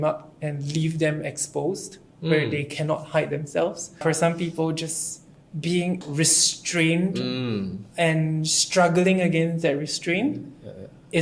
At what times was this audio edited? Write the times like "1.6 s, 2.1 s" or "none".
3.9 s, 6.0 s